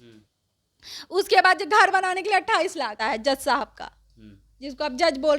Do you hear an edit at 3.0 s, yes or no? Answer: yes